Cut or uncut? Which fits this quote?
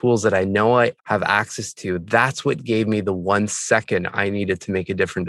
uncut